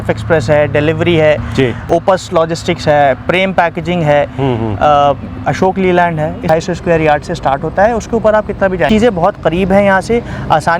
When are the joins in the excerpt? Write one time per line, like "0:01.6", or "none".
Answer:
0:01.9
0:06.5
0:08.9